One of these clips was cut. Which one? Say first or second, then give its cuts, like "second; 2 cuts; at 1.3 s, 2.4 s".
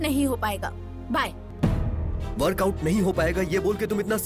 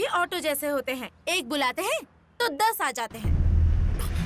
first; 1 cut; at 1.4 s